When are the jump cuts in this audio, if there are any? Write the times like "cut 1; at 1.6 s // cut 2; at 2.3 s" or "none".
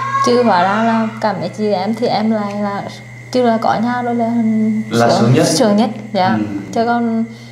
none